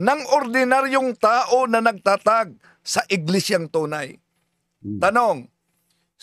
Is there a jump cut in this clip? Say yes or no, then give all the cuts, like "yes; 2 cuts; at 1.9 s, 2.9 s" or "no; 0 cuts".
no; 0 cuts